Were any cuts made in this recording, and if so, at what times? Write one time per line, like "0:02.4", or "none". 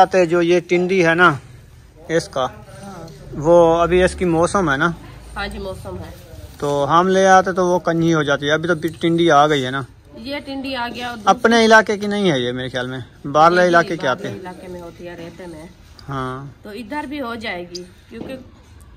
none